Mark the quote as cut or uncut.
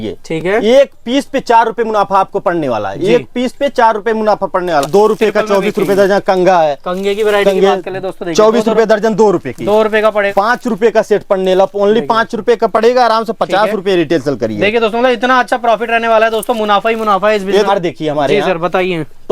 cut